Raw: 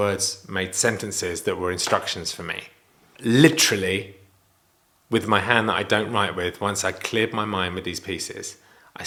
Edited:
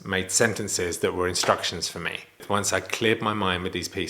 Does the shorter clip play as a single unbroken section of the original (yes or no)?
no